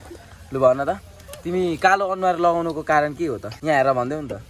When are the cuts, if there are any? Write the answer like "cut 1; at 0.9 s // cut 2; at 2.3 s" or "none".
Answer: cut 1; at 3.5 s